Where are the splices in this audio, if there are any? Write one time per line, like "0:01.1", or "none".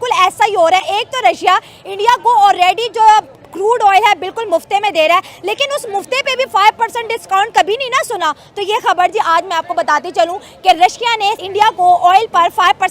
0:11.4